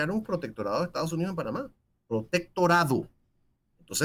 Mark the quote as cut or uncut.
uncut